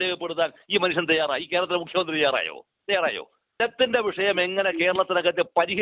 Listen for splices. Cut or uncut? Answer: cut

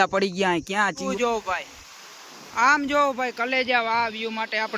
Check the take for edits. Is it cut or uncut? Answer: cut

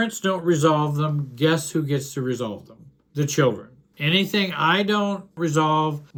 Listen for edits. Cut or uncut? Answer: uncut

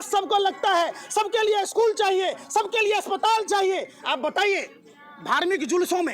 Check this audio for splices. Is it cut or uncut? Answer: uncut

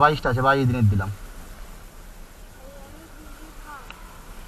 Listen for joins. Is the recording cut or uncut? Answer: uncut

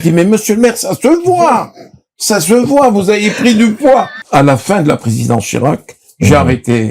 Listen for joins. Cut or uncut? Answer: cut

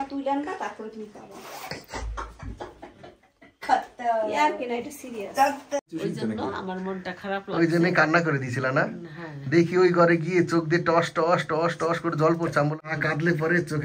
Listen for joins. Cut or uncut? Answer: cut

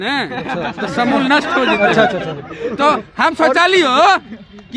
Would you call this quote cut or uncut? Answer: uncut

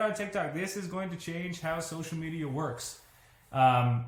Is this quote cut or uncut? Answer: uncut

